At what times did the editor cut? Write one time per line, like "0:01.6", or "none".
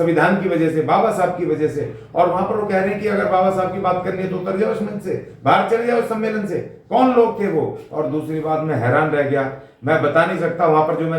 none